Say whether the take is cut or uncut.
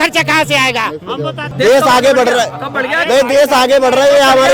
cut